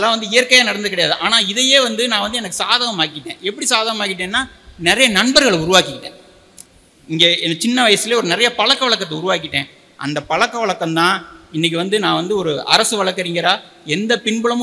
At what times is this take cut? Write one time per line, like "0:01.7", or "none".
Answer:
none